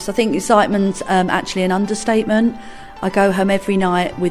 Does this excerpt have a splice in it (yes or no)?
no